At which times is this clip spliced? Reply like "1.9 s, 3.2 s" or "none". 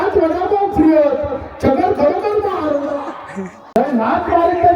3.8 s